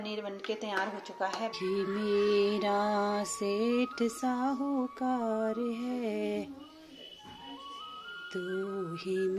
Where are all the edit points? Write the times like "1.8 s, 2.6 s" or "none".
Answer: 1.5 s